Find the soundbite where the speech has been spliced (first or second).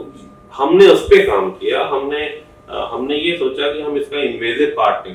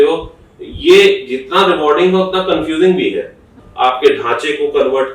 second